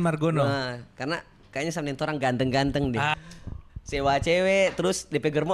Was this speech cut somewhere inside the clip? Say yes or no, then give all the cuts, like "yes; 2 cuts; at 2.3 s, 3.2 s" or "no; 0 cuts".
yes; 1 cut; at 3.1 s